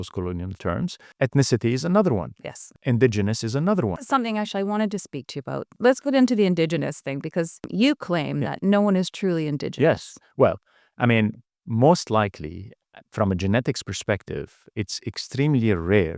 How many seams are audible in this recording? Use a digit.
5